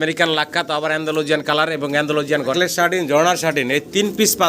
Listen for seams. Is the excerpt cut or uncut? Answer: cut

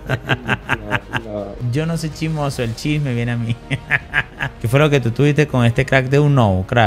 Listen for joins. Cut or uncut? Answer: cut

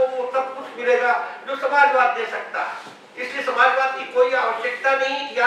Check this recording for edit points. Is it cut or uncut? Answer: uncut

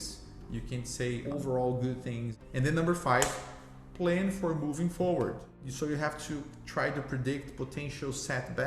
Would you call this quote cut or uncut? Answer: cut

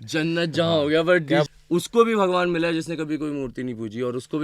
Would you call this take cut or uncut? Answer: cut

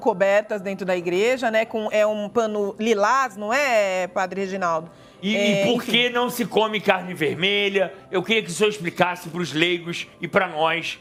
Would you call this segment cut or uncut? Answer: uncut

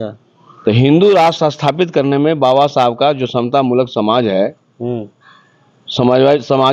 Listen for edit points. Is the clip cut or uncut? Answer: uncut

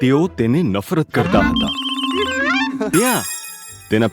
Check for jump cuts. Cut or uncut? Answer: cut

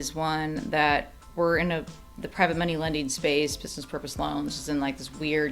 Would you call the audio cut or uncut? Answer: uncut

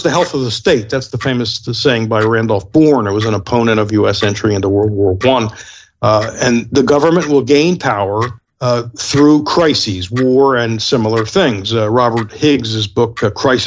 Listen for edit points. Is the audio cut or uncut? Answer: uncut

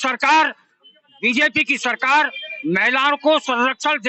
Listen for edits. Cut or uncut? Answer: uncut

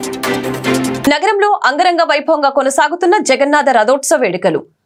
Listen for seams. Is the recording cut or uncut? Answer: uncut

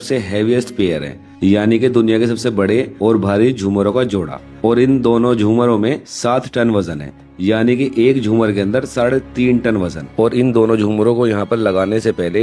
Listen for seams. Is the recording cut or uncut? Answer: uncut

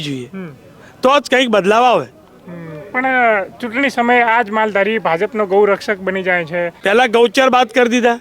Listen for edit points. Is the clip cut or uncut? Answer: cut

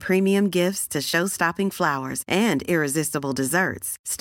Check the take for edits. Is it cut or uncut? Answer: uncut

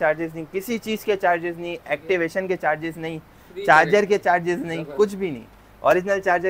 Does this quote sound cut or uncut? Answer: uncut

